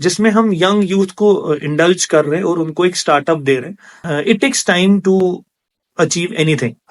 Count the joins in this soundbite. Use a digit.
1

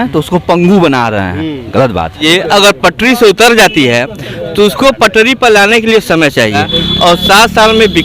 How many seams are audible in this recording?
2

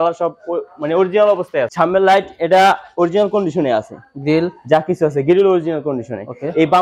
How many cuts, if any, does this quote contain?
1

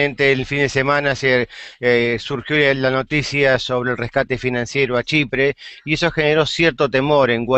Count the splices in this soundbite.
1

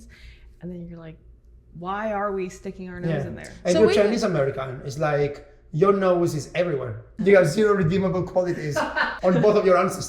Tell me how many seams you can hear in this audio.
2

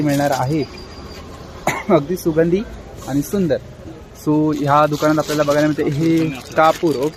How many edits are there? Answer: 0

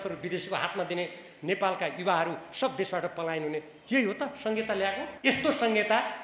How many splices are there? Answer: 1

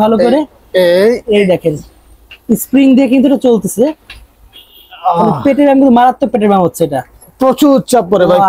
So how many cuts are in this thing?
0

